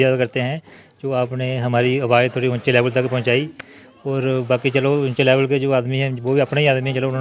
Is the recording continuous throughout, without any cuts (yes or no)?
yes